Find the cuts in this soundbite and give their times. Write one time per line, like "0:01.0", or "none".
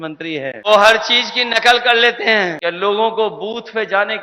0:00.7
0:02.6

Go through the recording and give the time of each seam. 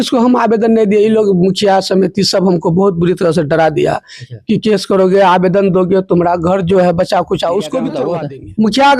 0:08.0

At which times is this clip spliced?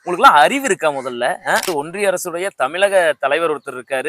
0:01.7

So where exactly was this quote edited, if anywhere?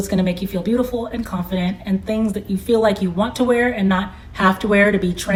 none

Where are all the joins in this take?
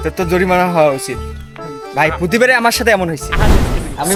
none

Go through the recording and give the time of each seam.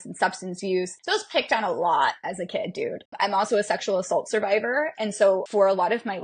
0:01.0
0:03.1
0:05.5

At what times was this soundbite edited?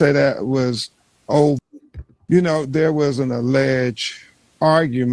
0:01.9

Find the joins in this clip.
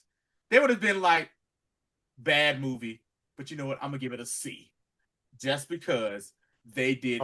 none

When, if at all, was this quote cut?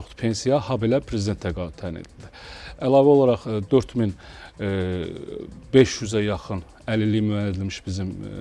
none

